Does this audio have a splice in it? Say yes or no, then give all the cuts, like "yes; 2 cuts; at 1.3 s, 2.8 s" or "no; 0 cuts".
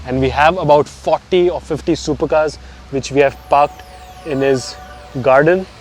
no; 0 cuts